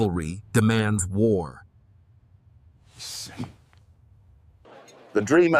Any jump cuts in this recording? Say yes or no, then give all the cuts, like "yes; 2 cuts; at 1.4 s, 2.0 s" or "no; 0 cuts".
yes; 1 cut; at 4.7 s